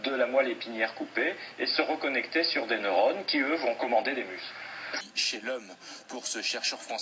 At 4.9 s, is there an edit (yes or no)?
yes